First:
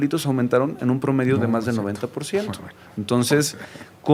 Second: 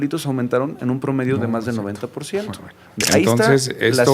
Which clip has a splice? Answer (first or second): second